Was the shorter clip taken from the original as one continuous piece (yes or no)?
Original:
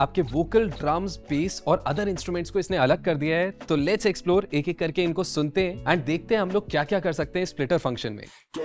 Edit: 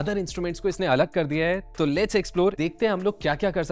no